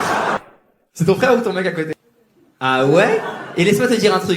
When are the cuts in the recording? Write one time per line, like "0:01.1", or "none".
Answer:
none